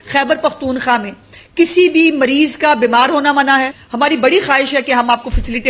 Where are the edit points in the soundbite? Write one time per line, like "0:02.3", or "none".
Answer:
0:03.8